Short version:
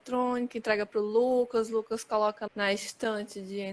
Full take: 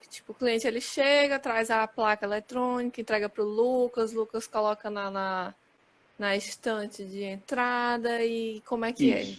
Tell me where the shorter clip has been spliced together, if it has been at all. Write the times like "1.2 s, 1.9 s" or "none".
2.4 s

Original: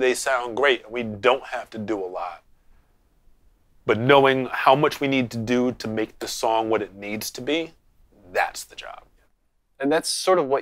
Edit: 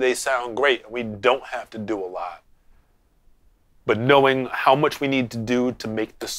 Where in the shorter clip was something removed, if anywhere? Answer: none

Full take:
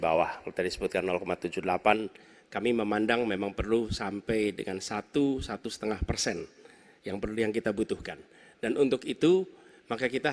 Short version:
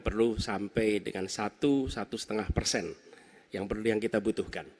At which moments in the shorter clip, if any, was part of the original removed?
none

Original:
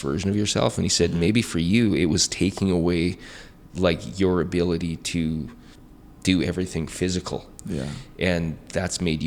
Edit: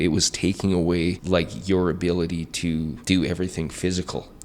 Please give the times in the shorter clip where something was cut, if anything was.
1.2 s, 3.0 s

